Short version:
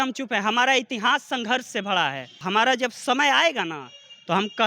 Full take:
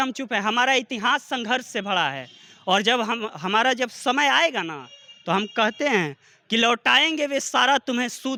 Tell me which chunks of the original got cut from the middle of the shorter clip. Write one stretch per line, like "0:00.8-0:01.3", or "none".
0:02.4-0:03.3